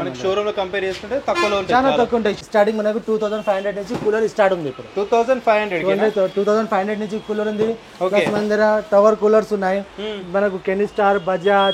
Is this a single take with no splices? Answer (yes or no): no